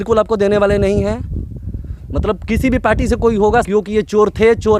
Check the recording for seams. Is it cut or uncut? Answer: uncut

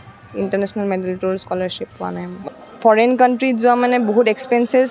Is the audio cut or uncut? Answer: cut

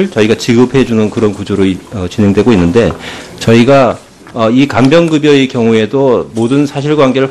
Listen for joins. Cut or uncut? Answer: cut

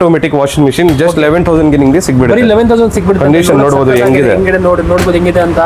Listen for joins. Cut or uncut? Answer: uncut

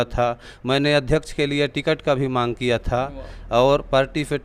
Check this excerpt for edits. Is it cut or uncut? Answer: uncut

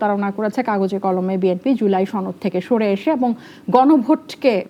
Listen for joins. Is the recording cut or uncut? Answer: uncut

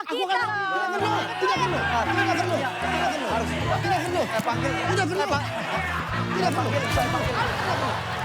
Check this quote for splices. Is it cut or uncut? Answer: uncut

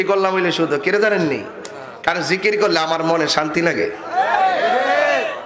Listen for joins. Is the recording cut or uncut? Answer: uncut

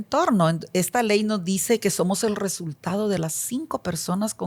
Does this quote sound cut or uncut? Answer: uncut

